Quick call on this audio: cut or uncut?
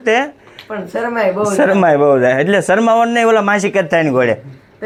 uncut